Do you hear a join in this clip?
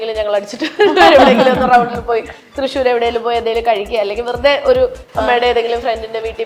no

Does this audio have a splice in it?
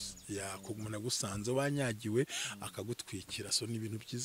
no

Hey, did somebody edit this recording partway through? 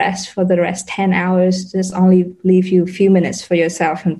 no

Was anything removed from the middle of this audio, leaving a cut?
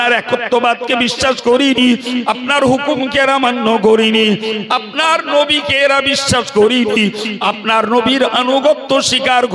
no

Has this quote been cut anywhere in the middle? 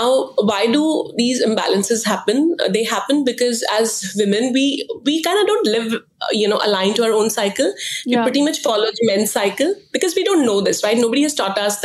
no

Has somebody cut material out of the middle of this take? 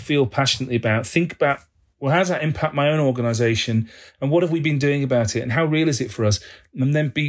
no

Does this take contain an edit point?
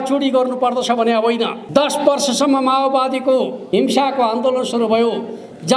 yes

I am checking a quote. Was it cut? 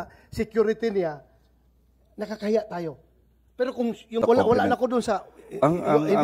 yes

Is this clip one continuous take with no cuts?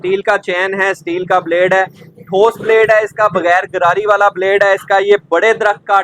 yes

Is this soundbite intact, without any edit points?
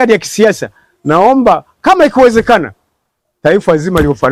yes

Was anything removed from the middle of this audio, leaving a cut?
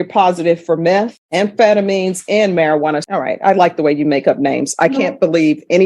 yes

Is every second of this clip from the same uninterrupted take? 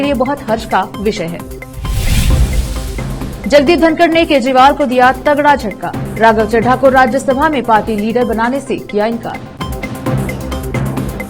yes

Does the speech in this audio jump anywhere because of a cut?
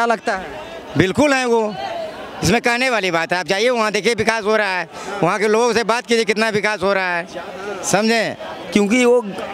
yes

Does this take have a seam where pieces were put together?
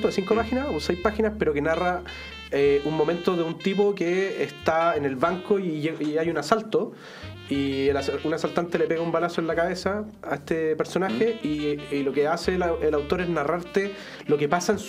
no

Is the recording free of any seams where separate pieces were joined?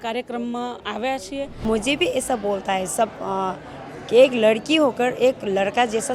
no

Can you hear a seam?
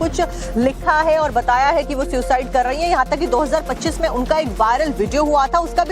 yes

